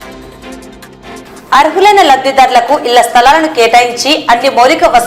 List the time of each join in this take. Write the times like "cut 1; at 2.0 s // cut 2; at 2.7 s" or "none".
cut 1; at 1.2 s